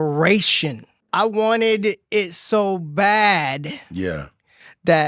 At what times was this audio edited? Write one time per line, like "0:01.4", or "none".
0:01.0